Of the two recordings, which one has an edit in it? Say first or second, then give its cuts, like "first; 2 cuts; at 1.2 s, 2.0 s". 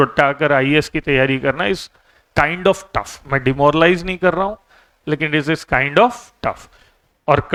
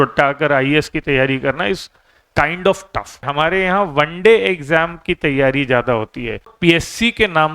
second; 2 cuts; at 3.3 s, 6.5 s